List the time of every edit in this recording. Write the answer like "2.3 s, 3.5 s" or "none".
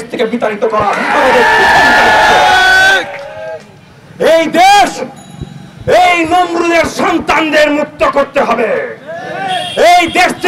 none